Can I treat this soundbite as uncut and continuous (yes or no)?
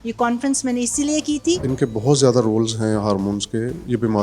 no